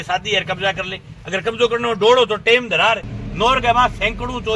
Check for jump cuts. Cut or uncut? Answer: cut